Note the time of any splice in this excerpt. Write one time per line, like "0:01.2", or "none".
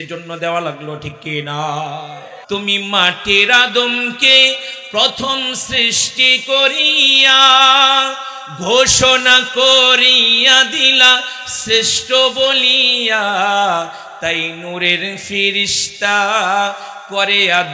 0:02.3